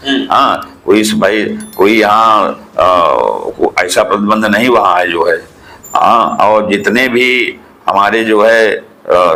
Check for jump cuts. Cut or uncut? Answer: uncut